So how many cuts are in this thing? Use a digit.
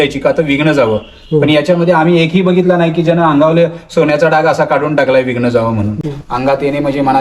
1